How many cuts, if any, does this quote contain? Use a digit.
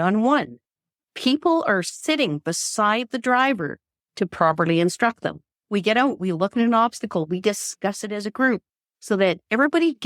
1